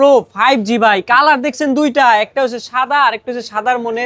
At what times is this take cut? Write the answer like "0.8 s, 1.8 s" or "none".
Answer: none